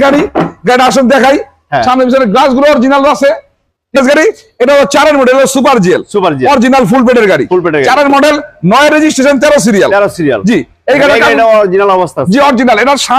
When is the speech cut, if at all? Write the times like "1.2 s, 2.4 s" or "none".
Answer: 4.0 s